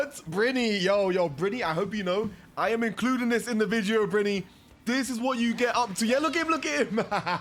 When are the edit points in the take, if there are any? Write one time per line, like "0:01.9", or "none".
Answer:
none